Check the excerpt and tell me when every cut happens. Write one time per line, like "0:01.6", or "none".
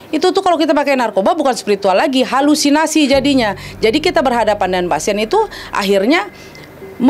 none